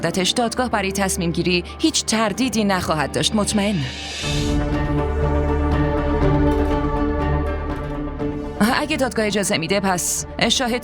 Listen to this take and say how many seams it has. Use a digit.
1